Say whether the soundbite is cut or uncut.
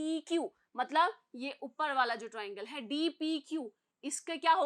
uncut